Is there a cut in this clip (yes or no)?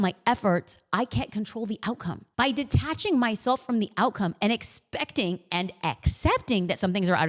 yes